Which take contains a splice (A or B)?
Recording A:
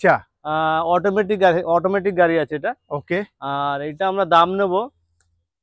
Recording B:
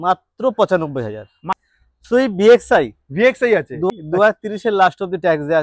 B